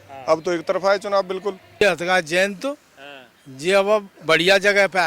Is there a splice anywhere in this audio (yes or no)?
yes